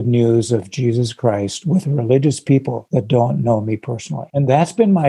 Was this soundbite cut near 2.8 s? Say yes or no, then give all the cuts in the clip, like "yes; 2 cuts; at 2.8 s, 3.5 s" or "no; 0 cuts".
yes; 2 cuts; at 2.8 s, 4.2 s